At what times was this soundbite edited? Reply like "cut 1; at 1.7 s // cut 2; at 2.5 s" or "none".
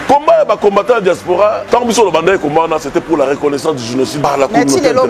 cut 1; at 1.6 s // cut 2; at 4.2 s

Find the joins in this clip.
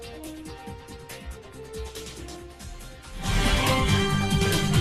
none

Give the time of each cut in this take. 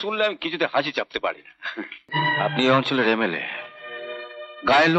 cut 1; at 2.0 s

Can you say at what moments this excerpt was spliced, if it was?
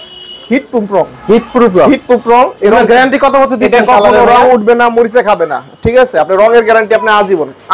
none

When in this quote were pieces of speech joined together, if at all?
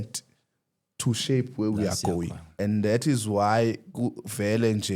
cut 1; at 2.4 s

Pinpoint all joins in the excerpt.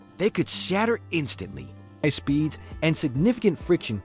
cut 1; at 2.0 s

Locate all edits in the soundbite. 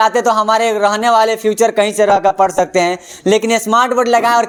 none

